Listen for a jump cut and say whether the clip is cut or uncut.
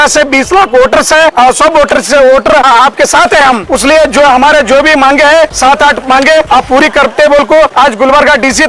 cut